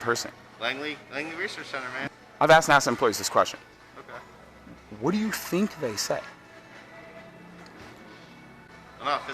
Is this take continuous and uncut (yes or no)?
no